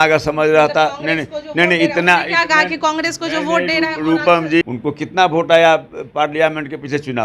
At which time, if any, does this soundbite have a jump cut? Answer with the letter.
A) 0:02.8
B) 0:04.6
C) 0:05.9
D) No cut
B